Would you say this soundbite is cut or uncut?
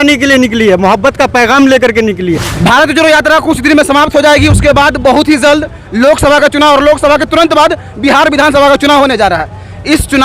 cut